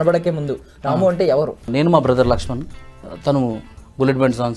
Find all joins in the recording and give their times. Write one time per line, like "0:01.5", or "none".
0:01.7